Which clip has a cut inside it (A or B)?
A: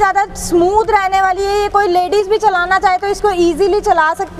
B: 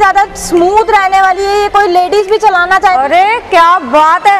B